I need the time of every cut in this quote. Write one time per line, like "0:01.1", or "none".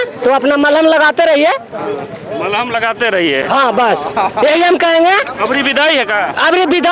none